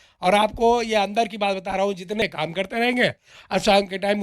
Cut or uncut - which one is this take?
cut